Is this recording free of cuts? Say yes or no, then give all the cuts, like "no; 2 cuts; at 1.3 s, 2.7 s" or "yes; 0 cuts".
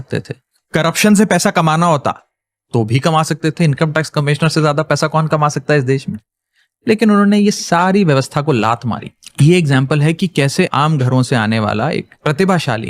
yes; 0 cuts